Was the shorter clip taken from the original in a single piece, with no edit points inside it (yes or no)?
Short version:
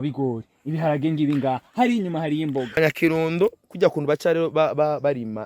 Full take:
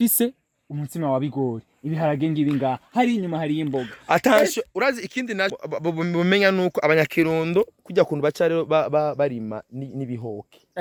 no